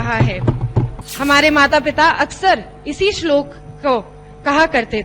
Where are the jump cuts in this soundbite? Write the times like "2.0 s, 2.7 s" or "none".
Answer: 1.0 s